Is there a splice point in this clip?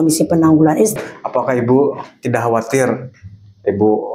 yes; 1 cut; at 1.0 s

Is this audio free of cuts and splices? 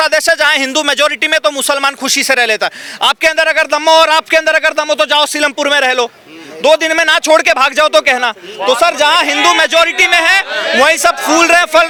yes; 0 cuts

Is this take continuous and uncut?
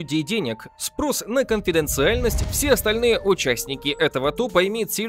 no; 1 cut; at 2.5 s

